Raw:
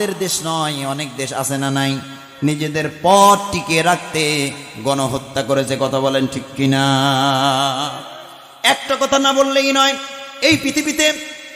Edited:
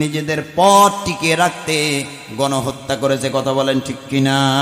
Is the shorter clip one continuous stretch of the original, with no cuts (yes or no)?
yes